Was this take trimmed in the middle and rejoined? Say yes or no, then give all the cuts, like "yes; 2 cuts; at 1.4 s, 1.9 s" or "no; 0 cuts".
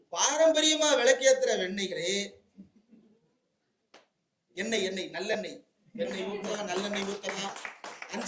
no; 0 cuts